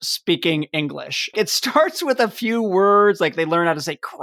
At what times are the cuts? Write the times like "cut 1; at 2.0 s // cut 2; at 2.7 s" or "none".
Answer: cut 1; at 1.3 s